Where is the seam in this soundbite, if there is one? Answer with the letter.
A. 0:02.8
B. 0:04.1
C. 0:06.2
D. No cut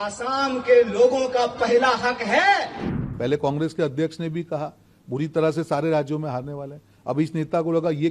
A